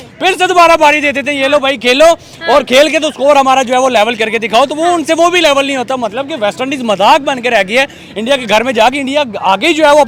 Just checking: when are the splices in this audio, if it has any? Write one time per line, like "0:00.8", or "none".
none